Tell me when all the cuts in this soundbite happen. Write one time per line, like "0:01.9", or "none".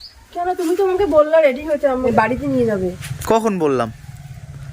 0:02.1